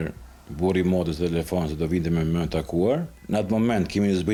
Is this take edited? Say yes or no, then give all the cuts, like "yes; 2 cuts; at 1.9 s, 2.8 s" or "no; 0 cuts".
no; 0 cuts